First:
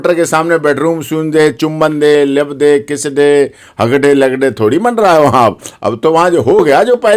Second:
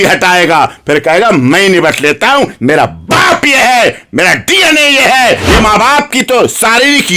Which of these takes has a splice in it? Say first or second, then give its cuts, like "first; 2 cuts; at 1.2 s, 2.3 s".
second; 1 cut; at 5.4 s